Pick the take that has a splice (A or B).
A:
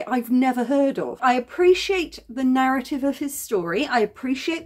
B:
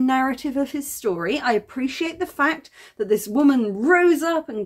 A